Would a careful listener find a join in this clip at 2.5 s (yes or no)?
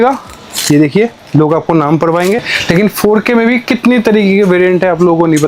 yes